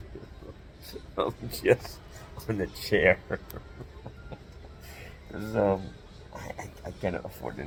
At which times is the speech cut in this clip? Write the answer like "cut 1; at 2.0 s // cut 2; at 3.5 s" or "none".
none